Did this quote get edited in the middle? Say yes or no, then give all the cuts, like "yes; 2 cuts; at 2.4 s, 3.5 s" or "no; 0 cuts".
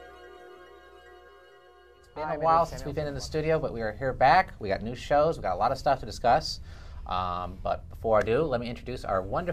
yes; 1 cut; at 8.3 s